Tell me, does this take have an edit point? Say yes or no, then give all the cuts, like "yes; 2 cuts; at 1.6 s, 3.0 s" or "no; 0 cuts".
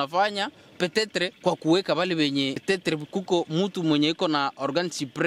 yes; 2 cuts; at 1.3 s, 2.6 s